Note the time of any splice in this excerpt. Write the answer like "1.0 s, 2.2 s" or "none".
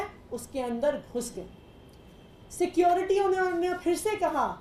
none